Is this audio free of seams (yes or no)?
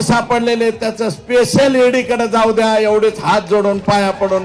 yes